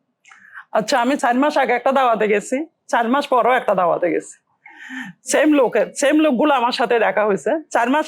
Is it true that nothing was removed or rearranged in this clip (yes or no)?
no